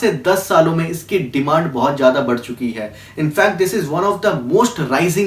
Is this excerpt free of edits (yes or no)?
yes